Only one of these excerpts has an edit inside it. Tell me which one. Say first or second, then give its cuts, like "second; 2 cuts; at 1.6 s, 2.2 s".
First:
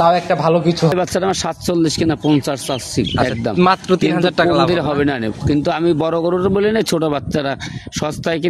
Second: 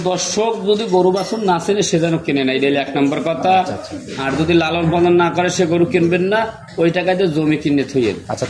first; 1 cut; at 0.9 s